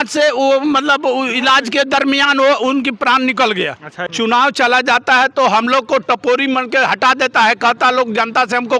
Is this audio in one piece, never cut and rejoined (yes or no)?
no